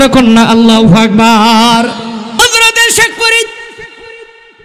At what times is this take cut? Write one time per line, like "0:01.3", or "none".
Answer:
0:02.4